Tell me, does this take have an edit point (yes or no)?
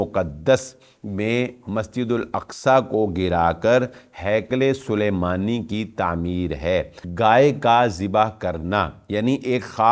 yes